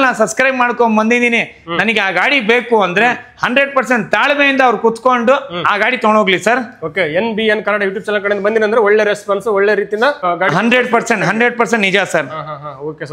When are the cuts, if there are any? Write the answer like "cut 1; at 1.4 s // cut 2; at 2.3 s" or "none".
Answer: none

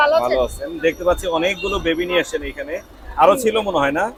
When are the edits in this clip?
none

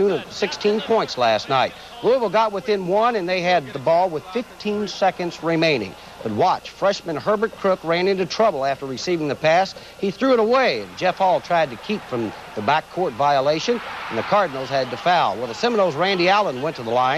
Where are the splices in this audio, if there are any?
cut 1; at 5.8 s

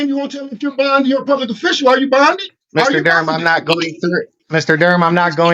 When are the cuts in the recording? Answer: cut 1; at 2.5 s // cut 2; at 4.4 s

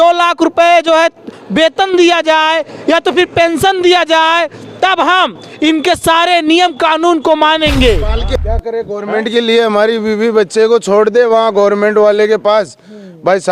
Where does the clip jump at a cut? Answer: cut 1; at 8.3 s

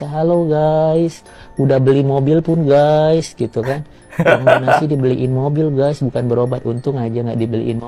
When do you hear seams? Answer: none

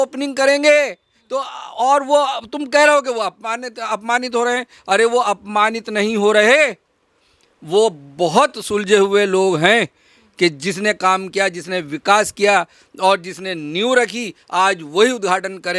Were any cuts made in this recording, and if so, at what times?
none

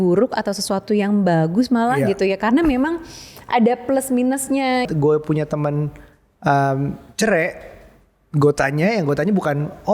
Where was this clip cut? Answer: cut 1; at 4.8 s

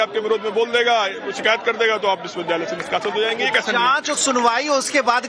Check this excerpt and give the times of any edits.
none

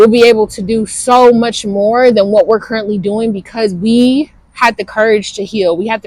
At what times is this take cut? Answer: none

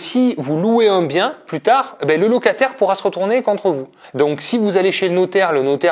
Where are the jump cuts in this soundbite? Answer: cut 1; at 4.0 s

